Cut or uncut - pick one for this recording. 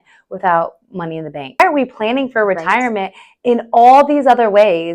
cut